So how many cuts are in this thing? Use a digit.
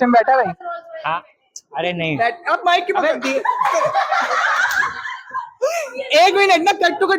0